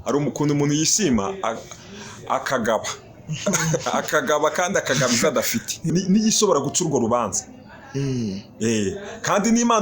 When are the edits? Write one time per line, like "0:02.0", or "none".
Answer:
0:05.9